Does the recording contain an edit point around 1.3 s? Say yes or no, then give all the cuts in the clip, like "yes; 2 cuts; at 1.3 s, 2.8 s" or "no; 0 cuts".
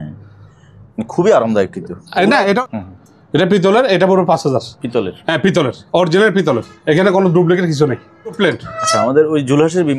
no; 3 cuts; at 2.6 s, 4.8 s, 8.4 s